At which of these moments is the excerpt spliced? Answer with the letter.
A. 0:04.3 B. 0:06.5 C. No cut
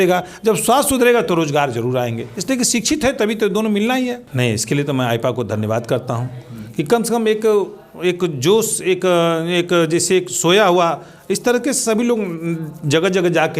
A